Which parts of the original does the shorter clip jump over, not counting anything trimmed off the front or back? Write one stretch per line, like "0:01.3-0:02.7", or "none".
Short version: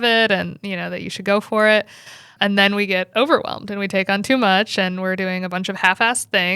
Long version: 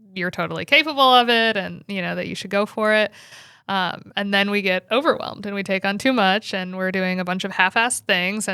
0:03.5-0:04.0